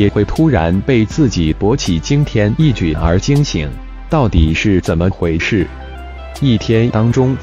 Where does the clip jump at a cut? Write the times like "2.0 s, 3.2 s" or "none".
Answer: none